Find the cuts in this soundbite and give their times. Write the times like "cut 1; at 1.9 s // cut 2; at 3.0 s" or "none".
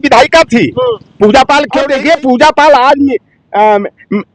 cut 1; at 1.8 s